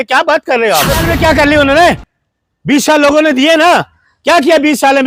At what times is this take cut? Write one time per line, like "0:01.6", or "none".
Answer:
0:01.1